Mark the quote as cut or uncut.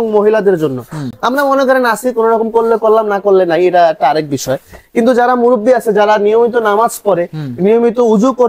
uncut